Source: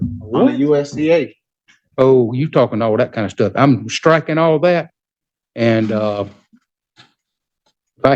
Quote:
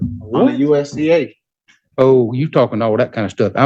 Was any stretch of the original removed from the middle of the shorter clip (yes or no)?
no